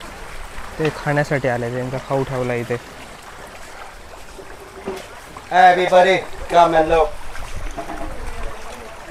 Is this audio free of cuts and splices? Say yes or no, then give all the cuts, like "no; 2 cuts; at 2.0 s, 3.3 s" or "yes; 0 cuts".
yes; 0 cuts